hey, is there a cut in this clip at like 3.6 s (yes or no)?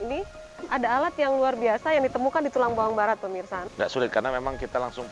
yes